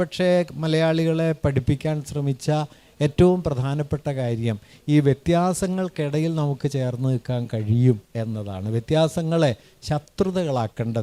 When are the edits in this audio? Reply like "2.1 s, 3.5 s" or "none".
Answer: none